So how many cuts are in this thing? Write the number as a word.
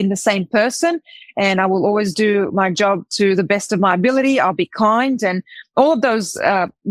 zero